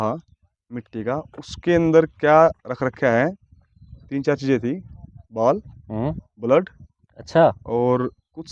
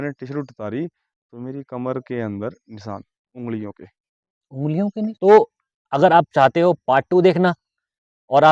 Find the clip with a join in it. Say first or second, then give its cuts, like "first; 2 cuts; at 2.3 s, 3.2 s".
second; 1 cut; at 5.1 s